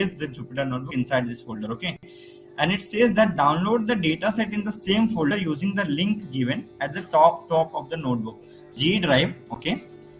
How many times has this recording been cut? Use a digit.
1